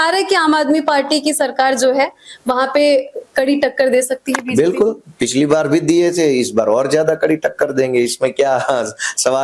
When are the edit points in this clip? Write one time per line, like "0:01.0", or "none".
none